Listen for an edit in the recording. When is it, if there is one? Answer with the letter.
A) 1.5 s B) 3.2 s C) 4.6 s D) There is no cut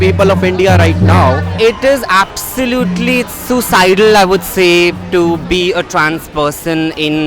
A